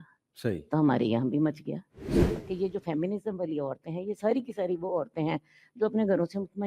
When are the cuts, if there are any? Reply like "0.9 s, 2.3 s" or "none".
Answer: 2.4 s